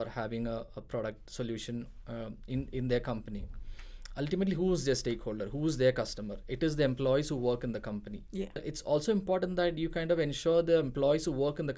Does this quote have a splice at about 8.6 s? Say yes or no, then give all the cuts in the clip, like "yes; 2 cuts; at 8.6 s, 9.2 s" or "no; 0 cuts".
yes; 1 cut; at 8.6 s